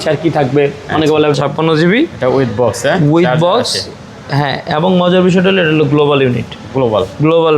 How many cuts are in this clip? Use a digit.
1